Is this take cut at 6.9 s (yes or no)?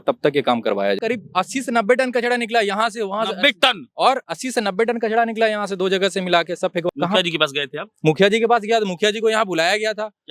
yes